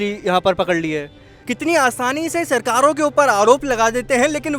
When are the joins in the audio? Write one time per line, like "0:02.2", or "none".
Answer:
0:01.4